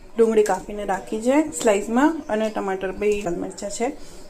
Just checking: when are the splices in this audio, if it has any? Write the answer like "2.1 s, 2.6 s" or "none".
3.3 s